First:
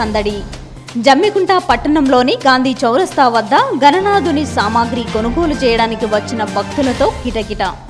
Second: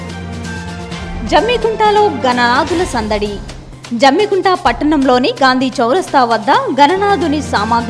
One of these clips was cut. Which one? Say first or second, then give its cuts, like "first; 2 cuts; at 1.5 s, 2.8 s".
second; 1 cut; at 1.1 s